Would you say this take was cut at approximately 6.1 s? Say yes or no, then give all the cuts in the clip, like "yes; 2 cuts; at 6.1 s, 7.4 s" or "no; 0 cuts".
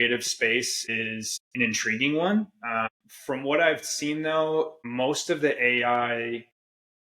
no; 3 cuts; at 1.0 s, 2.8 s, 4.8 s